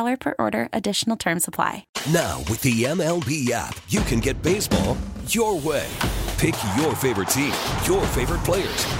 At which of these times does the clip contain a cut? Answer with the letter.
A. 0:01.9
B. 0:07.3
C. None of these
A